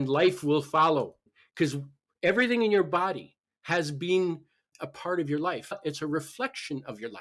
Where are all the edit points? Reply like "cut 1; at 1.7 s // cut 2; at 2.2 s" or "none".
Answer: cut 1; at 1.3 s